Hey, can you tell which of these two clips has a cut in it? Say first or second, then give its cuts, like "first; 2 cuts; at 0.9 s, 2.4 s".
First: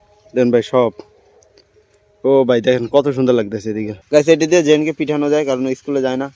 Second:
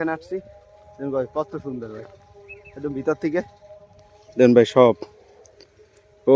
first; 1 cut; at 3.9 s